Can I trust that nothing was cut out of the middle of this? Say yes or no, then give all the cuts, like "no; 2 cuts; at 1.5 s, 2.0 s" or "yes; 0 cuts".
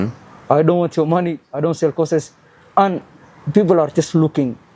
yes; 0 cuts